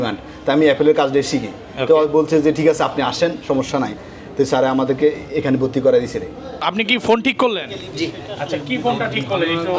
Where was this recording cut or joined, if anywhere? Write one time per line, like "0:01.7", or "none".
0:06.6